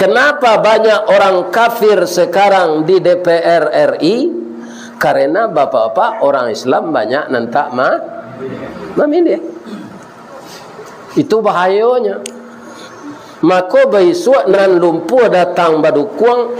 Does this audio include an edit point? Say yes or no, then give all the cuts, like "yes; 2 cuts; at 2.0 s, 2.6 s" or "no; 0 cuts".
yes; 1 cut; at 14.6 s